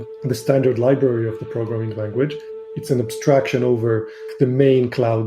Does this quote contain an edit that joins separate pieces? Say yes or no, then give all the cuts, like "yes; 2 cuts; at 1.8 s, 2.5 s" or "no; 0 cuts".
yes; 1 cut; at 2.6 s